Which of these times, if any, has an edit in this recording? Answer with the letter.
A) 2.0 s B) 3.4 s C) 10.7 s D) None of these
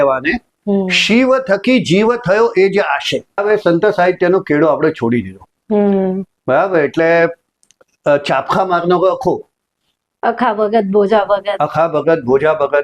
B